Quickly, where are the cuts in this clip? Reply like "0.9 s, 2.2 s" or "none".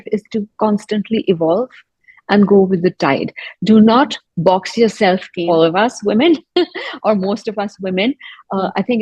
5.3 s